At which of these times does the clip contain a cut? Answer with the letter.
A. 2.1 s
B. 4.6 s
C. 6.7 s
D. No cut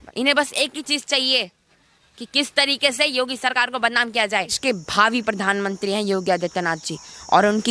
B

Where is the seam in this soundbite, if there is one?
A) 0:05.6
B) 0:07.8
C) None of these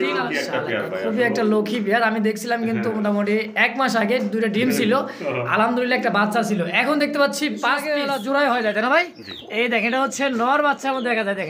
B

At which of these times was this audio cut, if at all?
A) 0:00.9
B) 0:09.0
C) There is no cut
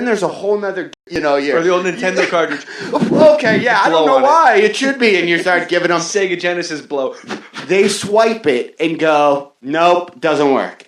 C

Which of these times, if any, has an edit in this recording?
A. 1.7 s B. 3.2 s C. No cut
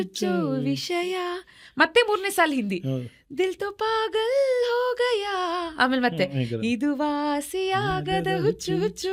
C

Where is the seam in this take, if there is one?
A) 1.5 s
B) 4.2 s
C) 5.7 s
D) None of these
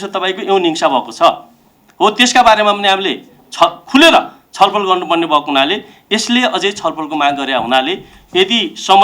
D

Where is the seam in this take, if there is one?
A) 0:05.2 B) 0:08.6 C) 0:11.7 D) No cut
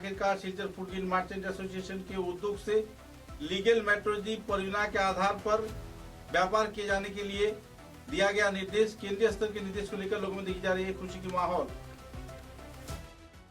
C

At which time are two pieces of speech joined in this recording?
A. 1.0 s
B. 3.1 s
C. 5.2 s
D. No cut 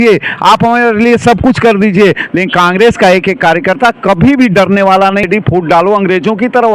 C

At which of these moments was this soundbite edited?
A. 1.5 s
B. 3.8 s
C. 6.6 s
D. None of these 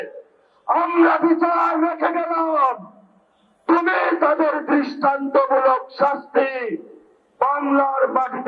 D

